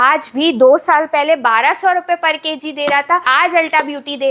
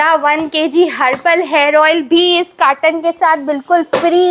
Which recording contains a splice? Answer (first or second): first